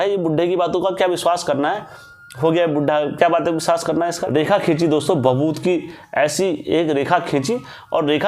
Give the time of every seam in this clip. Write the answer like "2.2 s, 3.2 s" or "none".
4.2 s